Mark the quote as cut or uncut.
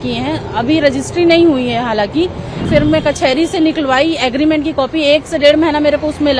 cut